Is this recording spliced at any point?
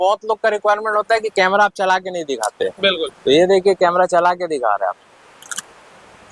no; 0 cuts

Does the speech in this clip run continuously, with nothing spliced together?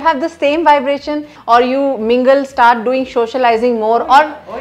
no; 1 cut; at 1.3 s

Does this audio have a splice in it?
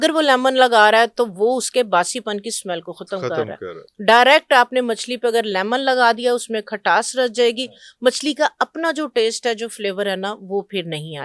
no; 0 cuts

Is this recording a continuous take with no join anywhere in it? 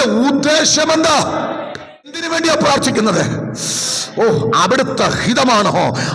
no; 1 cut; at 2.2 s

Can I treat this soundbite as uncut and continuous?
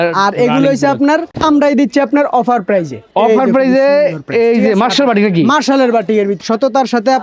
no; 2 cuts; at 1.3 s, 6.3 s

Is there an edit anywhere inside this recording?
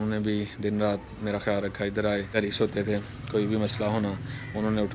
yes; 1 cut; at 2.4 s

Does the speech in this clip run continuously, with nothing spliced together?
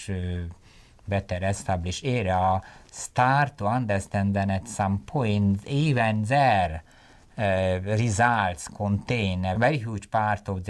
yes; 0 cuts

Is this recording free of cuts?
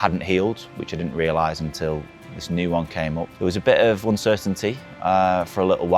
no; 1 cut; at 3.3 s

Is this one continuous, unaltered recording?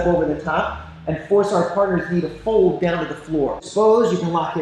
no; 1 cut; at 3.6 s

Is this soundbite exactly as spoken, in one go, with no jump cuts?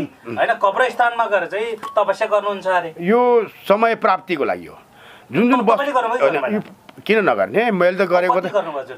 yes; 0 cuts

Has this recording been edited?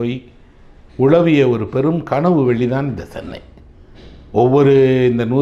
no; 0 cuts

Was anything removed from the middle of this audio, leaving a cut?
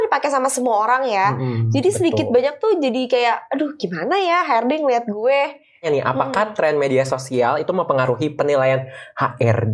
yes; 1 cut; at 5.8 s

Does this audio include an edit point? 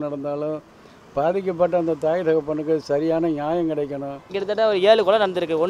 yes; 1 cut; at 4.4 s

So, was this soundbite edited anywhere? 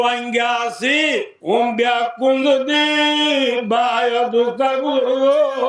yes; 1 cut; at 1.3 s

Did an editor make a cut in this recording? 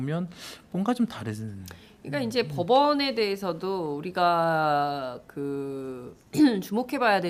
no; 0 cuts

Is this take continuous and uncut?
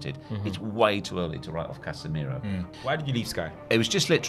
no; 1 cut; at 2.7 s

